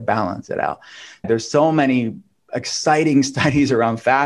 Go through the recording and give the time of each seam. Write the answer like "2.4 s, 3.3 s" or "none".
1.2 s